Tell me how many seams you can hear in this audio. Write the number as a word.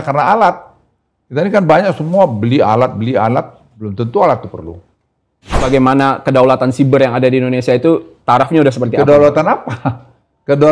one